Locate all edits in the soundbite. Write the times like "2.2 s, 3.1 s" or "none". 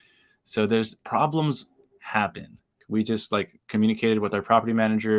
2.7 s